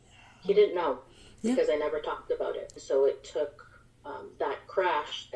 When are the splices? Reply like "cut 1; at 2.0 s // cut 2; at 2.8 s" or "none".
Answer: cut 1; at 2.7 s